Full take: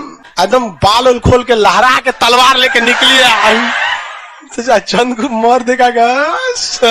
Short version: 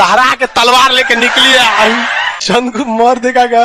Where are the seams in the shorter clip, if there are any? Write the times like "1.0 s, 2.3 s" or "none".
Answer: 2.7 s